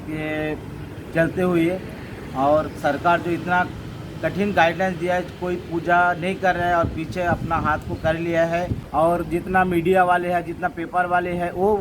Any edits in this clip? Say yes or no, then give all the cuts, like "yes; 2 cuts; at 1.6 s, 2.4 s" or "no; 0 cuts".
yes; 1 cut; at 8.8 s